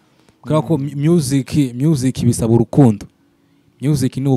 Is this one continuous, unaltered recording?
yes; 0 cuts

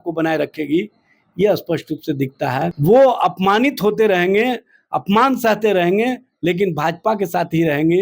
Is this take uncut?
no; 1 cut; at 2.7 s

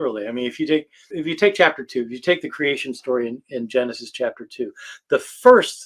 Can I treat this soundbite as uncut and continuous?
no; 1 cut; at 1.2 s

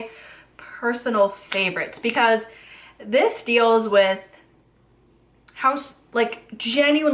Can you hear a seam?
no; 0 cuts

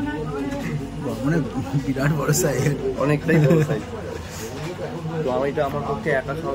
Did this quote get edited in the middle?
no; 0 cuts

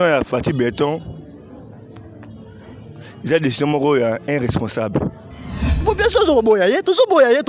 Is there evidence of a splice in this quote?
yes; 1 cut; at 5.8 s

